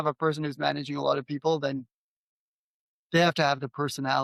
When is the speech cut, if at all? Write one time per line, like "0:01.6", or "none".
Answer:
none

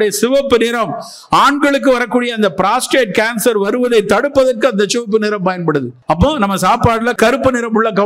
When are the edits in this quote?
0:05.9
0:07.2

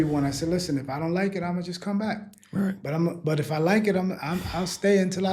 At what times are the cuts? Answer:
none

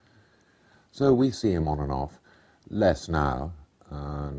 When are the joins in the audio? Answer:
0:01.2

